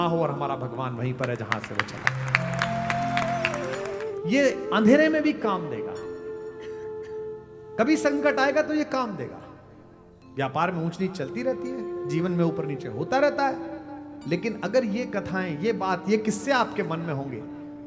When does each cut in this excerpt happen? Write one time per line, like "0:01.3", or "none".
0:03.8